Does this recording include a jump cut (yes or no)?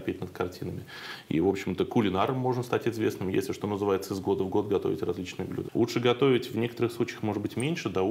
yes